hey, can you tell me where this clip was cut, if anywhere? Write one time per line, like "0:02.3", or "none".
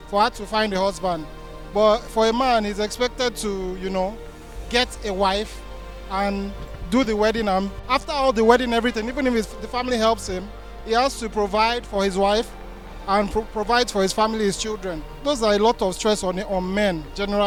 none